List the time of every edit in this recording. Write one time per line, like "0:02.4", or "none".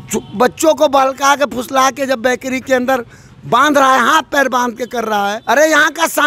0:05.4